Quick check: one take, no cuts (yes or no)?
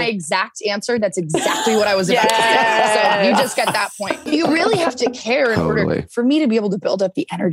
no